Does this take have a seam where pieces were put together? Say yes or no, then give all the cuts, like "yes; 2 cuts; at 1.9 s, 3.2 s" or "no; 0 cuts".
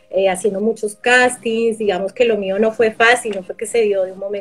no; 0 cuts